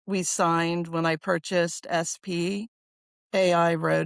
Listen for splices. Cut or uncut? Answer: uncut